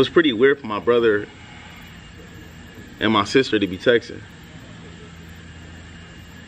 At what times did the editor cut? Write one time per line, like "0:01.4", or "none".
none